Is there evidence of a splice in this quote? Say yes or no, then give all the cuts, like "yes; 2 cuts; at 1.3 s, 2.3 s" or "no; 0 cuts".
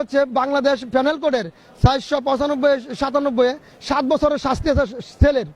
no; 0 cuts